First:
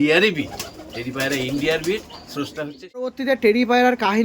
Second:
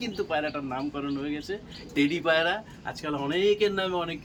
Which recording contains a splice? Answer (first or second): first